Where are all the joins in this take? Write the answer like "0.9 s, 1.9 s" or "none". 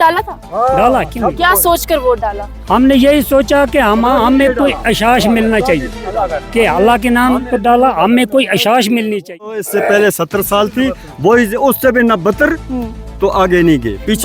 9.6 s